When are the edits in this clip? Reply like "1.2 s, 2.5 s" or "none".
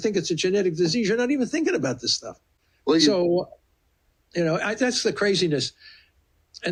none

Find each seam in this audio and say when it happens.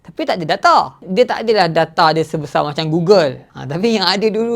3.5 s

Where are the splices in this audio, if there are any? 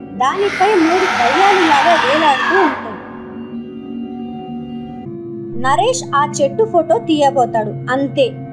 5.0 s

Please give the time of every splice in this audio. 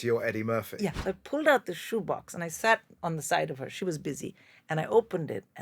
1.0 s

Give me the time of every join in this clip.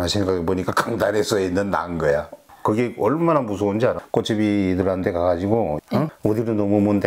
2.4 s, 4.0 s, 5.8 s

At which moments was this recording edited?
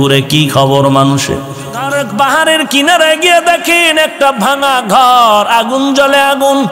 1.8 s

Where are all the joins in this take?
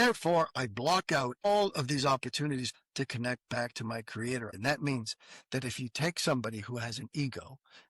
1.5 s, 2.8 s, 4.5 s

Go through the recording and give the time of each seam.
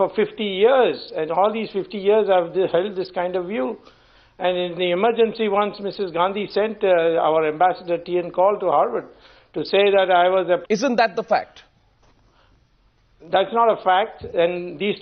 none

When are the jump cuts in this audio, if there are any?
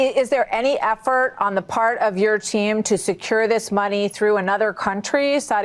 none

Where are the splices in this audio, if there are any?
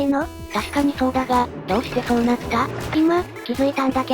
2.8 s

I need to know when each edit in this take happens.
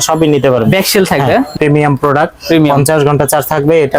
1.5 s

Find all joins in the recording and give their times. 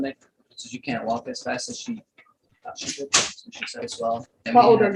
3.9 s

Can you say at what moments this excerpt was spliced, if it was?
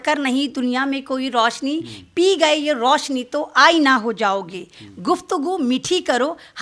none

